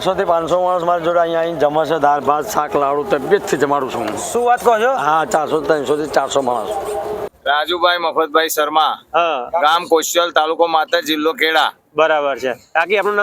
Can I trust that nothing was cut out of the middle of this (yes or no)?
no